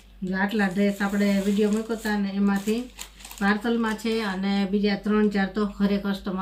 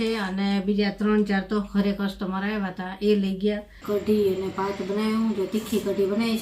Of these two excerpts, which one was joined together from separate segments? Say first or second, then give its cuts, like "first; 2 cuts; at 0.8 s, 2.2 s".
second; 1 cut; at 3.7 s